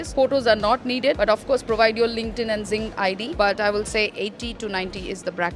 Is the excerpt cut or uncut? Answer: cut